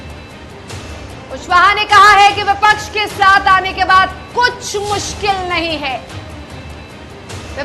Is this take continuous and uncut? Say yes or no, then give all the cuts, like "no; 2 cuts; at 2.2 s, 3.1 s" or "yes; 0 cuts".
no; 1 cut; at 0.9 s